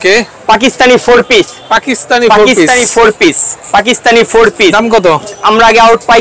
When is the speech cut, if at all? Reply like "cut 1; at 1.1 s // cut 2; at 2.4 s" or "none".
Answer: none